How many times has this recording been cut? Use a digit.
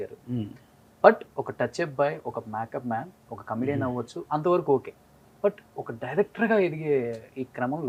0